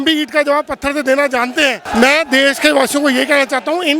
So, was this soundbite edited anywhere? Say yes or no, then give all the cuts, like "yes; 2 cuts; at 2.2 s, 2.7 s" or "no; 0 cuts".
yes; 1 cut; at 1.8 s